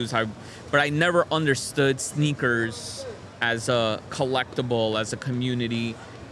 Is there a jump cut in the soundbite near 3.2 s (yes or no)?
no